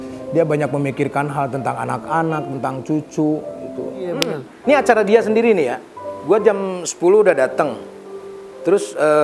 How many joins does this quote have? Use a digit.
1